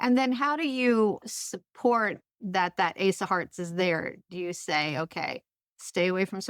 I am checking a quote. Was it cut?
yes; 2 cuts; at 1.2 s, 2.3 s

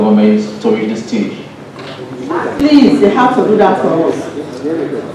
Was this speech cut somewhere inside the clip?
yes; 1 cut; at 2.6 s

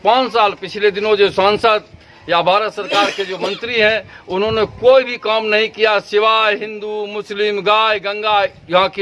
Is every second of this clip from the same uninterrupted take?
yes; 0 cuts

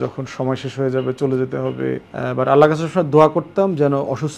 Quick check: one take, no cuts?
no; 1 cut; at 2.1 s

